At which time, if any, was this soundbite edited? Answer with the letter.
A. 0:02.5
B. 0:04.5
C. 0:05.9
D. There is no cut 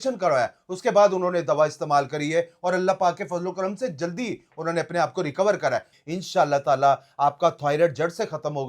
C